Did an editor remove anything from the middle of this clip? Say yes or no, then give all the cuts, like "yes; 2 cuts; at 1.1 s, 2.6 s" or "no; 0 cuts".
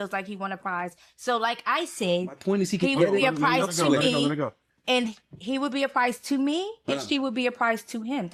no; 0 cuts